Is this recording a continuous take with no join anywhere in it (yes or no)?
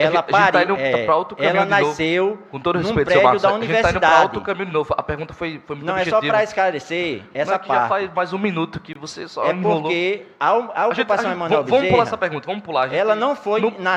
yes